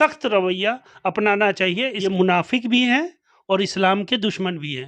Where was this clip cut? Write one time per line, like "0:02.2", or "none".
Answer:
0:01.9